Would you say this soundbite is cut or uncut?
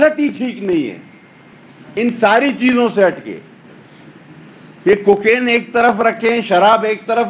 uncut